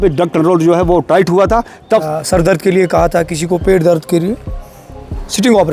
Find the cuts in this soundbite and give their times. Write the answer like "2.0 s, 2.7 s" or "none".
2.0 s